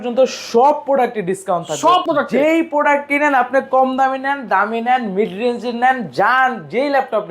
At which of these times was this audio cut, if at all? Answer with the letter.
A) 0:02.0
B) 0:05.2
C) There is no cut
A